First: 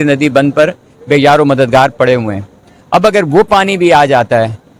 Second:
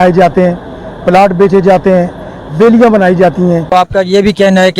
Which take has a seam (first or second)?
second